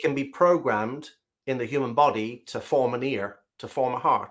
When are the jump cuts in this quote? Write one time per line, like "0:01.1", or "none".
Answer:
none